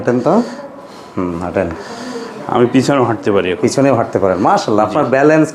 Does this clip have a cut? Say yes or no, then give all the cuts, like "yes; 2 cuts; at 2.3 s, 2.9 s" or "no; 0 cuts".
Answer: no; 0 cuts